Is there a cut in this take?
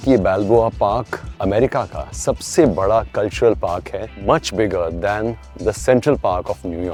no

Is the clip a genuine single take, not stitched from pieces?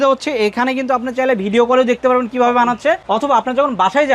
no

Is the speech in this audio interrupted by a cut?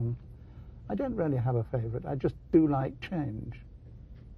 yes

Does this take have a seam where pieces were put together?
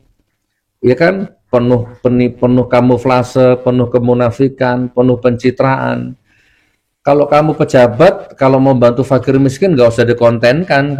no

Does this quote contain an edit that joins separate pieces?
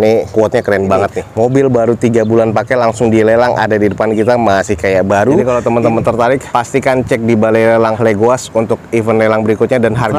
yes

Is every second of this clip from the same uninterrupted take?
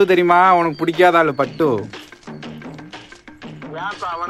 yes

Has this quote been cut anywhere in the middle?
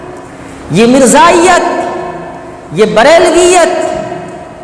no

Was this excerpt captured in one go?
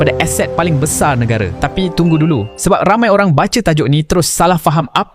yes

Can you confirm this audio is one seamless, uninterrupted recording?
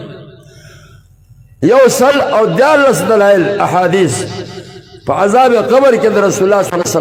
yes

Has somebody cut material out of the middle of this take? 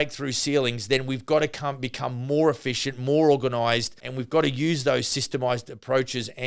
yes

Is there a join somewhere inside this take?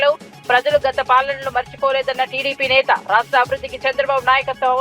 no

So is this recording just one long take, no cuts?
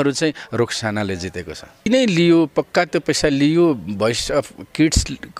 no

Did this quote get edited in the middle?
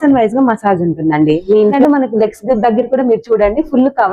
yes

